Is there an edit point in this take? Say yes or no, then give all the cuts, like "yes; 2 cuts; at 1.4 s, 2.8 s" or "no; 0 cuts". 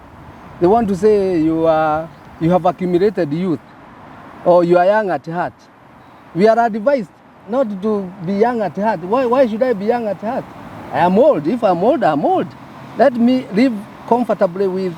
no; 0 cuts